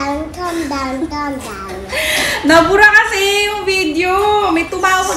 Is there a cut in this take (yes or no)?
no